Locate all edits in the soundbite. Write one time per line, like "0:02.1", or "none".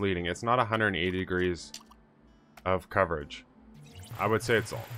0:04.0